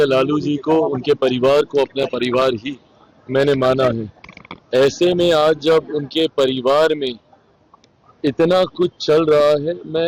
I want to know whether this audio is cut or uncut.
uncut